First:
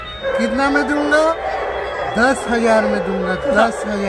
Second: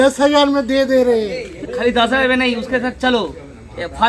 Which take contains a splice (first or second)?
second